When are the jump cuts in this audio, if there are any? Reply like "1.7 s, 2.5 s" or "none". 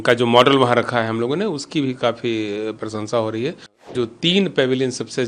3.8 s